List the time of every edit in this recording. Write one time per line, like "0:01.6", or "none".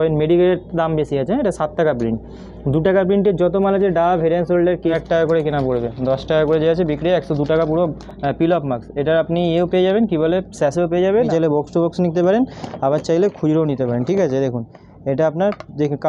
0:05.0
0:08.0
0:11.3